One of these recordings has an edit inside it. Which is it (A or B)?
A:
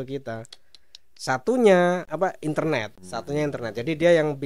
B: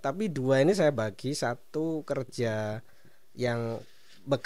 A